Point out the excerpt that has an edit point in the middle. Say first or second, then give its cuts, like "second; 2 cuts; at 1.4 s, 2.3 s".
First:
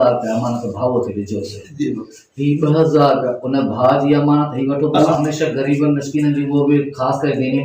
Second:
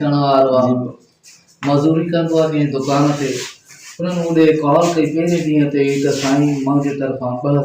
first; 1 cut; at 5.1 s